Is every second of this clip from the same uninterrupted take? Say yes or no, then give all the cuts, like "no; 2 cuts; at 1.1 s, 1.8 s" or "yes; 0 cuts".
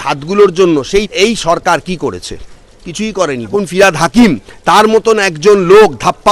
no; 2 cuts; at 1.1 s, 3.5 s